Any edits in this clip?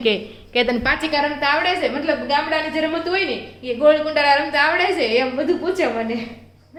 no; 0 cuts

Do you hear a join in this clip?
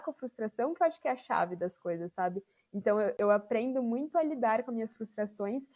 no; 0 cuts

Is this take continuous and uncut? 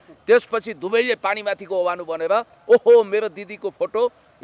yes; 0 cuts

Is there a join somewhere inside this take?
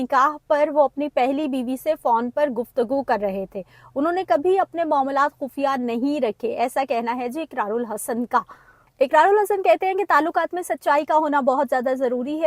no; 0 cuts

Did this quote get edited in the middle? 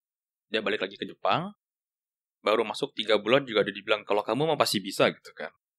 no; 0 cuts

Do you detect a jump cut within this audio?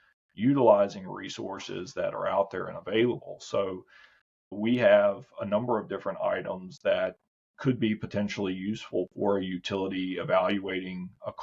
yes; 1 cut; at 4.5 s

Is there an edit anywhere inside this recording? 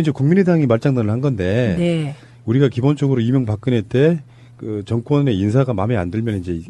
yes; 1 cut; at 5.0 s

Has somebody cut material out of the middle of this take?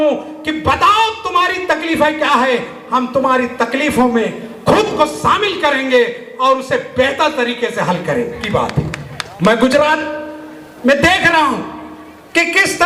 no; 0 cuts

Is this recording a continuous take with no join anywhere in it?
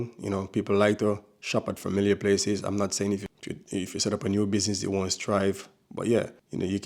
no; 1 cut; at 3.3 s

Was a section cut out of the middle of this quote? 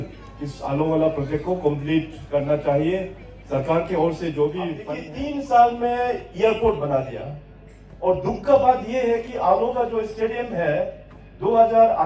yes; 1 cut; at 4.9 s

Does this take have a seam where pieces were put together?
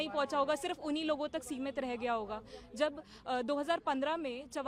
no; 0 cuts

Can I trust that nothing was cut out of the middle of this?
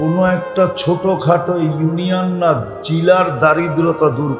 yes; 0 cuts

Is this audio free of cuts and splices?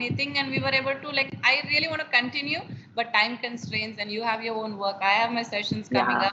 yes; 0 cuts

